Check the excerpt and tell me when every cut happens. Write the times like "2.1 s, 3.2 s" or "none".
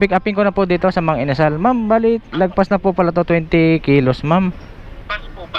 none